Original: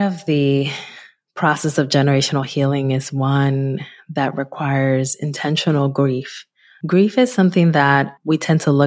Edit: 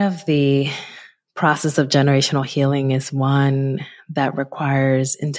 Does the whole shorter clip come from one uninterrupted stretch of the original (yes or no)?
yes